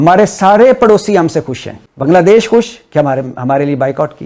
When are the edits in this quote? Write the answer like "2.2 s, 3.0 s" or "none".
none